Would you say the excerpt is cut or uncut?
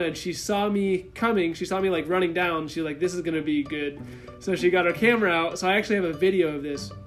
uncut